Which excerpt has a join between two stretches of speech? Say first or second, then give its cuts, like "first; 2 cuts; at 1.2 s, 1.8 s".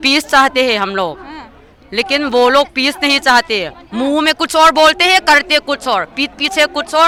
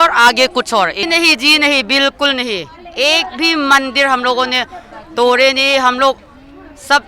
second; 1 cut; at 1.0 s